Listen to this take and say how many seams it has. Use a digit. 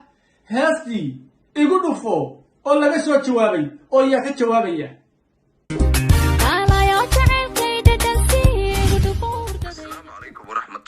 1